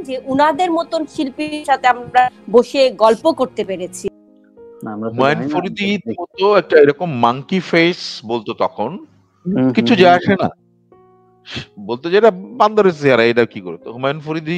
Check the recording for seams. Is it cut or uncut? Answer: uncut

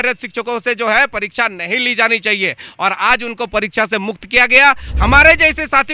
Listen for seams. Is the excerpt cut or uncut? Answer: cut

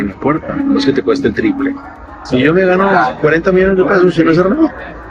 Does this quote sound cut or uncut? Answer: cut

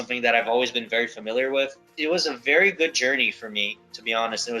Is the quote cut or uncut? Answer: cut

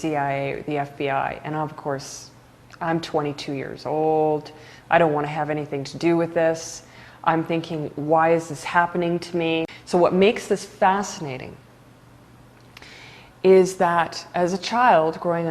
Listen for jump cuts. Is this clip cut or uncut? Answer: cut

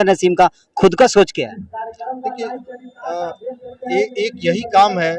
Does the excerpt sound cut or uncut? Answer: uncut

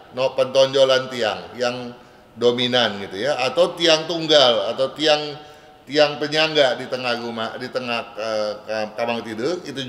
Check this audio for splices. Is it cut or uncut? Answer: uncut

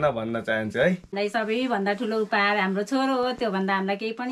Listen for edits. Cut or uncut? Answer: cut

